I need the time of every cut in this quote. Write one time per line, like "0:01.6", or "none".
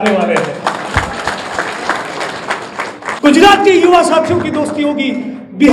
0:03.1

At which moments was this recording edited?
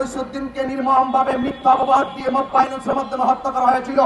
none

